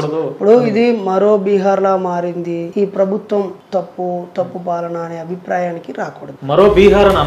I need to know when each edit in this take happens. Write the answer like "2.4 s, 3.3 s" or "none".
2.7 s, 3.6 s, 6.3 s